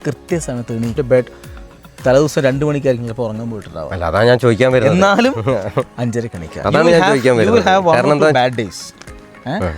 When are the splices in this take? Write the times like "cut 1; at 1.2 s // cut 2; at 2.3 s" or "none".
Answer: cut 1; at 0.9 s